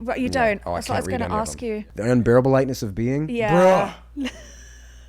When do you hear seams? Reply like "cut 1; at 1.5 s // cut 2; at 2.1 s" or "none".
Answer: cut 1; at 1.9 s